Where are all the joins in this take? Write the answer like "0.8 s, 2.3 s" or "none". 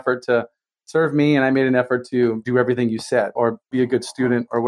2.4 s, 3.3 s